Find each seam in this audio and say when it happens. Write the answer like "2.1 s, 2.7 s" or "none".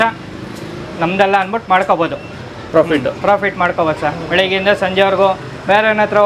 none